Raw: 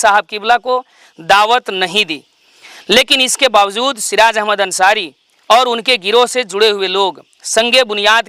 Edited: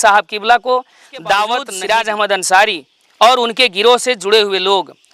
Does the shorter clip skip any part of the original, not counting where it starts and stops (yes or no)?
yes